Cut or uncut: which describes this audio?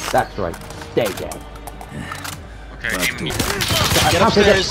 cut